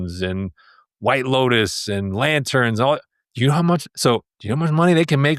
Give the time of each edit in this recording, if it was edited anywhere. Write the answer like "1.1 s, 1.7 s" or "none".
3.2 s